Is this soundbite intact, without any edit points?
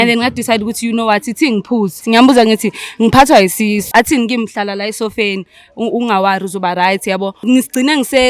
no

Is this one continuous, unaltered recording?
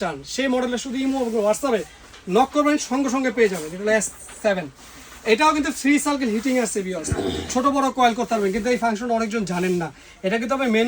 yes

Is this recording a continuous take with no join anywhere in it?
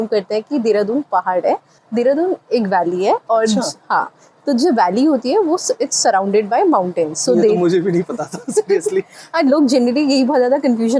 yes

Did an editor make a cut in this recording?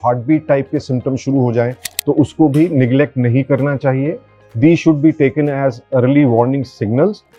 no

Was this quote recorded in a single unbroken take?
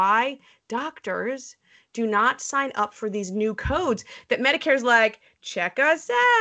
yes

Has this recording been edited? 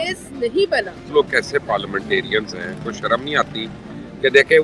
yes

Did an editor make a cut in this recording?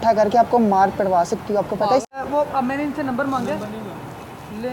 yes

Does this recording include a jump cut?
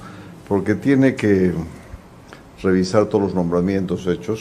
no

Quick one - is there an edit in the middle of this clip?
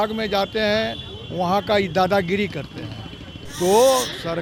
no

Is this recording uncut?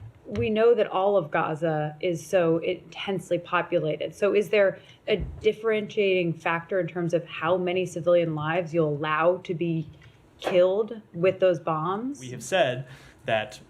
no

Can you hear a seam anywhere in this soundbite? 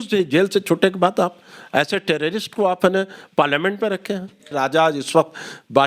yes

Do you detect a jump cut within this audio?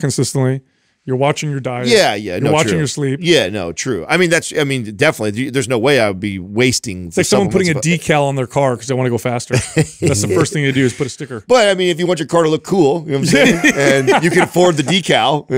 no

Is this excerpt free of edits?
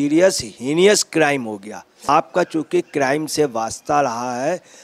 no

